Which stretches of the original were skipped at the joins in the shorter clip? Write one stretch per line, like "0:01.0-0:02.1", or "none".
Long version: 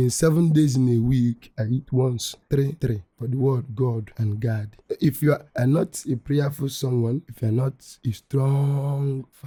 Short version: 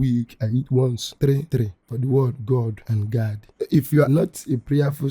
0:01.9-0:02.1
0:05.4-0:05.7